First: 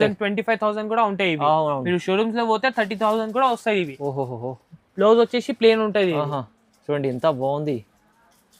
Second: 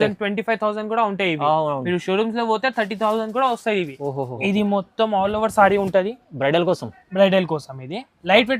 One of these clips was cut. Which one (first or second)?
second